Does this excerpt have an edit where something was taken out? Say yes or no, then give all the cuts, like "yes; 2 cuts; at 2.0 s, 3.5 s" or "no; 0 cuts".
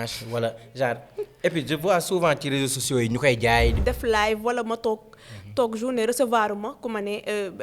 yes; 1 cut; at 3.8 s